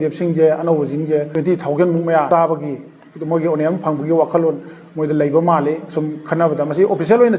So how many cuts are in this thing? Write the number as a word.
two